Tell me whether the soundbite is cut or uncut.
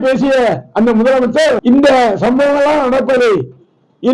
cut